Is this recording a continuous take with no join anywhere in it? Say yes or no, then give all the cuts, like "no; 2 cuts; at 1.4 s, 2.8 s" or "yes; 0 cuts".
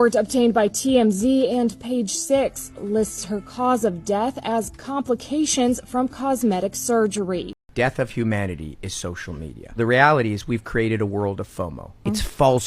no; 1 cut; at 7.5 s